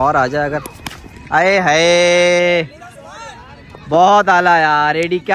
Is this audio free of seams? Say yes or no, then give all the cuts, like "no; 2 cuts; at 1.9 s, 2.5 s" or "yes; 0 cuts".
yes; 0 cuts